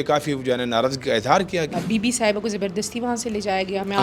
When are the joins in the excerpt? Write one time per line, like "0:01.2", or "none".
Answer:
0:01.7